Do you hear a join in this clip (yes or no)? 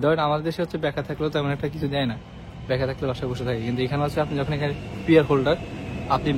no